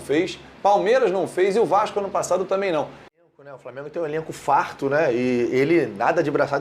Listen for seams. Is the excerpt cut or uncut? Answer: cut